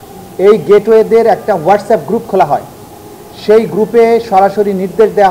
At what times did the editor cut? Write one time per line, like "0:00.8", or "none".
none